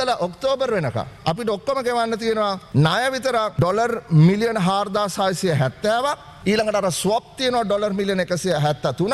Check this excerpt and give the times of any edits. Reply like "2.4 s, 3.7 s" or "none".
1.1 s, 2.6 s, 3.5 s, 6.3 s